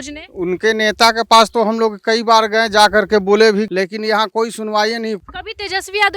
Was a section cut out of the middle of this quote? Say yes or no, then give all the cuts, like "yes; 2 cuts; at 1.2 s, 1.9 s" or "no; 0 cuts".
yes; 2 cuts; at 3.7 s, 5.2 s